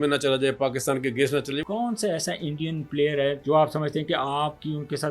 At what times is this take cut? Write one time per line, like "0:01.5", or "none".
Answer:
0:01.6
0:03.4